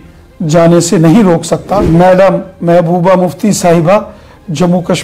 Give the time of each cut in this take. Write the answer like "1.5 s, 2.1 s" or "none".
1.8 s